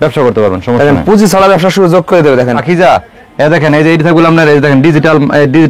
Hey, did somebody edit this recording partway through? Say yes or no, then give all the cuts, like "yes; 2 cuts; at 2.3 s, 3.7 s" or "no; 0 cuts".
yes; 1 cut; at 2.6 s